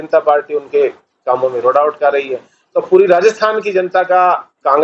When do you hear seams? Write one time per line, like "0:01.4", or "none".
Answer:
none

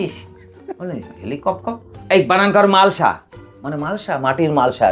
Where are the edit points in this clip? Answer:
0:01.9

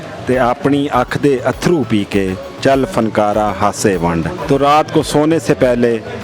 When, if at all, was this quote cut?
0:04.3

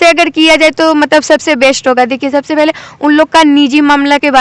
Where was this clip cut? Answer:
none

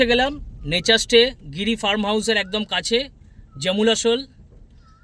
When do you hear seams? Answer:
none

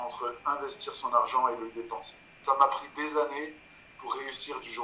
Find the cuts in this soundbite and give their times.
0:02.4

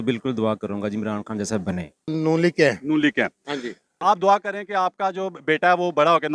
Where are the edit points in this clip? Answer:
0:02.1
0:04.0

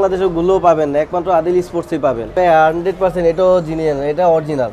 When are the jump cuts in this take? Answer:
0:02.3

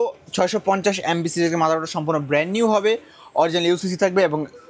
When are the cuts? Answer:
none

